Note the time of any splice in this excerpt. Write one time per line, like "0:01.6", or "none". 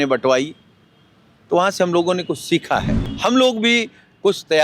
0:03.0